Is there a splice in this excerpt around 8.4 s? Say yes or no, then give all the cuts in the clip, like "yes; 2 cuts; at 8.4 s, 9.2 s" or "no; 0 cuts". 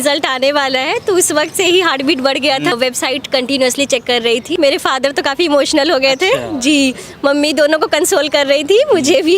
no; 2 cuts; at 2.7 s, 4.5 s